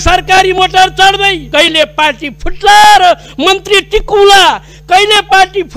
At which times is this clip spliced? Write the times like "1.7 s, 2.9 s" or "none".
1.4 s